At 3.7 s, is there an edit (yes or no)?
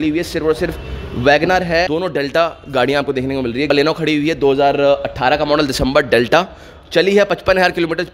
yes